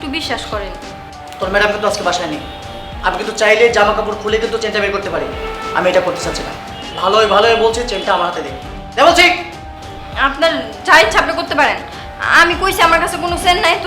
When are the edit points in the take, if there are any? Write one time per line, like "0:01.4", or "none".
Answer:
0:01.3